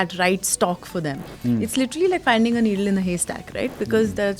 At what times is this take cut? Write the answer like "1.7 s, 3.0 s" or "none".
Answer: none